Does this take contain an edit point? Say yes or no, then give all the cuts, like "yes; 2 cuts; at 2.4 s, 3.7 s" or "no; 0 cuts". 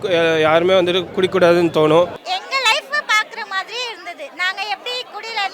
yes; 1 cut; at 2.3 s